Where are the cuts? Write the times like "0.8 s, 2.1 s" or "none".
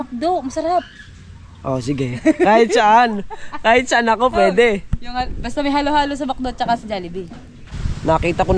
7.5 s

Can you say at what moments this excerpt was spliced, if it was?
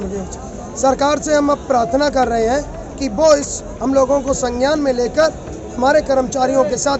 none

